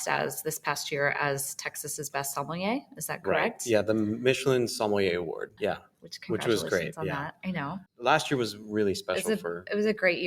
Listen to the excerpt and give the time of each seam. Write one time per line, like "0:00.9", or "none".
0:07.8